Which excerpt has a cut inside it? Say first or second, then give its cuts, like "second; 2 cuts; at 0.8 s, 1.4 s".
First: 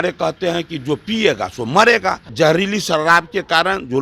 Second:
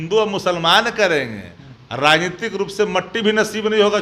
first; 1 cut; at 2.2 s